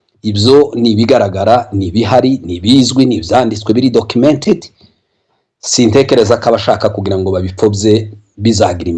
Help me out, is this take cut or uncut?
uncut